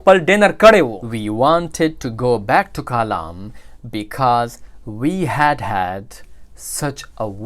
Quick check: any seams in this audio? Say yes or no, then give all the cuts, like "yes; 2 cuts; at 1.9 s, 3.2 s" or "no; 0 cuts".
yes; 1 cut; at 1.0 s